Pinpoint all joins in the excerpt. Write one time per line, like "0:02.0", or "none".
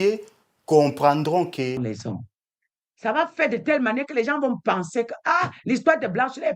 0:01.8